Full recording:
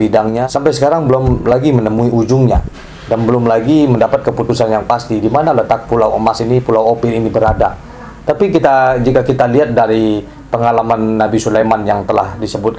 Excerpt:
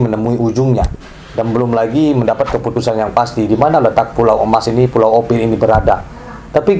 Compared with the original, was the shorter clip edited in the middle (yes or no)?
no